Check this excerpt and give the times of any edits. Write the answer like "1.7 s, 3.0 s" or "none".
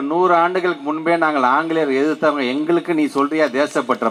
none